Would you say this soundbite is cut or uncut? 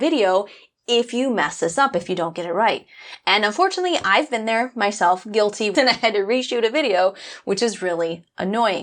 cut